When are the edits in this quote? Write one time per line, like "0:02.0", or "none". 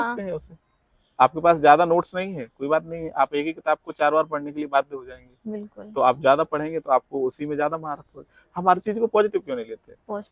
none